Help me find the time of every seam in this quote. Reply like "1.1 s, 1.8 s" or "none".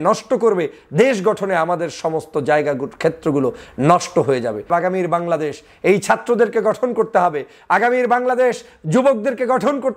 4.7 s